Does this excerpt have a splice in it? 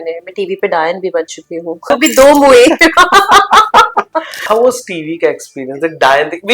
yes; 2 cuts; at 1.8 s, 4.3 s

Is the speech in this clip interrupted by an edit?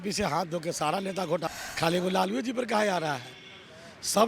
yes; 1 cut; at 1.5 s

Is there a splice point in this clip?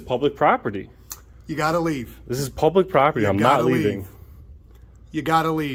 no; 0 cuts

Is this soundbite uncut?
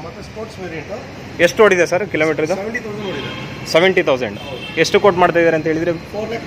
yes; 0 cuts

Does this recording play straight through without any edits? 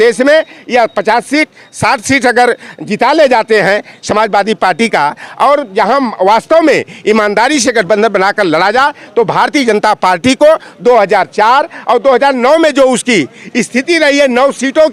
yes; 0 cuts

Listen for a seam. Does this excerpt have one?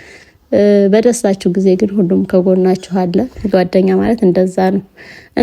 yes; 1 cut; at 3.2 s

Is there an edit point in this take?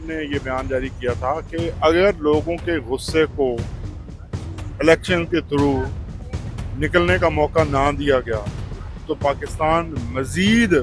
no; 0 cuts

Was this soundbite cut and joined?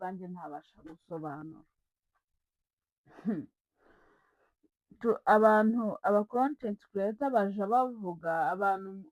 no; 0 cuts

